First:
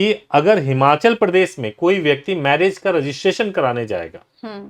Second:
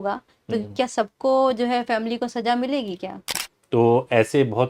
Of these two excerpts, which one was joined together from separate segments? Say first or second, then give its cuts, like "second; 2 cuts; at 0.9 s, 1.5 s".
second; 1 cut; at 3.2 s